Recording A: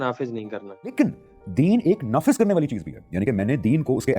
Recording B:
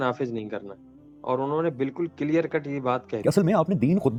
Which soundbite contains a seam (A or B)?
A